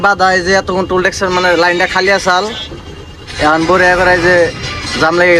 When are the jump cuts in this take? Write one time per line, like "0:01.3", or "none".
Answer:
none